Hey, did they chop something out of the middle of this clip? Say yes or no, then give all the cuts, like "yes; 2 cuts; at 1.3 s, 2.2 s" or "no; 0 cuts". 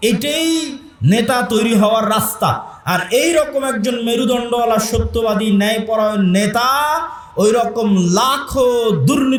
no; 0 cuts